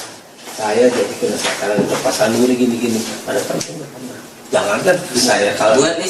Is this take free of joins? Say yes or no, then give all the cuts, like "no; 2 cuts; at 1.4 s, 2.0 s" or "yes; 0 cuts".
no; 1 cut; at 5.2 s